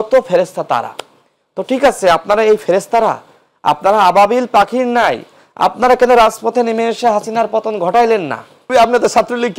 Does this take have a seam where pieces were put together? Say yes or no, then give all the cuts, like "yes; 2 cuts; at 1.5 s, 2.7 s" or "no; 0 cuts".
yes; 1 cut; at 8.7 s